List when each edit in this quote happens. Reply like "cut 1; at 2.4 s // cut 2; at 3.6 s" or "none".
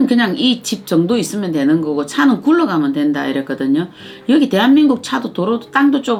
none